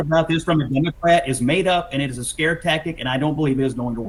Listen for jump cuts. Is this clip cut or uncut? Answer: uncut